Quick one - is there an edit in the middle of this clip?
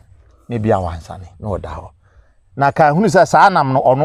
no; 0 cuts

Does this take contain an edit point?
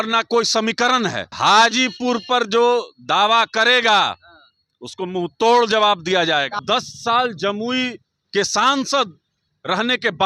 yes; 2 cuts; at 1.3 s, 6.6 s

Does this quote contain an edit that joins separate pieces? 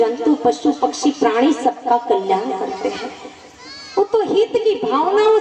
no; 0 cuts

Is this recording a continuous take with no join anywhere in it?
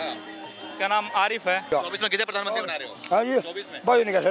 no; 1 cut; at 1.7 s

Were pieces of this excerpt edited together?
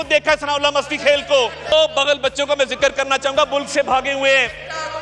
yes; 1 cut; at 1.7 s

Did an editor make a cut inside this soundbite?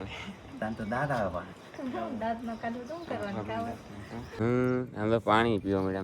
yes; 1 cut; at 4.4 s

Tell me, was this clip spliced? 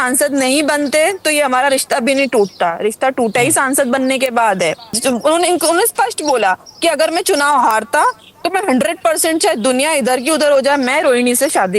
yes; 1 cut; at 5.0 s

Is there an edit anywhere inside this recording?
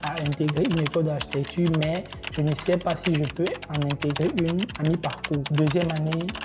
yes; 1 cut; at 5.5 s

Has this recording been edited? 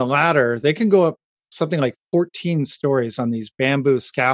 no; 0 cuts

